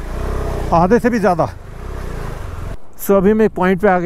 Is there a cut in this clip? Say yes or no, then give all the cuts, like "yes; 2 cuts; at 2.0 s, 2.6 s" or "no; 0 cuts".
yes; 1 cut; at 2.8 s